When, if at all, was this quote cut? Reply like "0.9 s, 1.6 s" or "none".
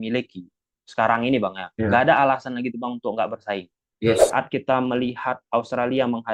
4.2 s